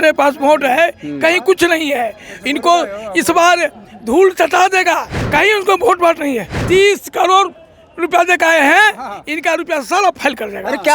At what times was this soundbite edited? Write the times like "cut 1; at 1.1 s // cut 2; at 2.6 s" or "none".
cut 1; at 5.1 s // cut 2; at 6.5 s